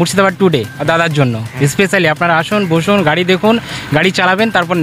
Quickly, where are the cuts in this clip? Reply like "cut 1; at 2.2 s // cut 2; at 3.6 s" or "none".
none